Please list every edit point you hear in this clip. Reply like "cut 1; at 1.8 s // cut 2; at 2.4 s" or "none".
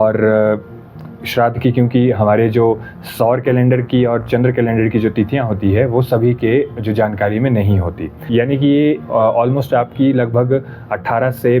cut 1; at 8.2 s